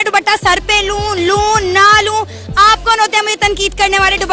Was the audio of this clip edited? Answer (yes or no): no